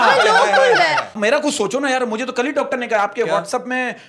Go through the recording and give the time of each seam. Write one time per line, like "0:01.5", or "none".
0:01.1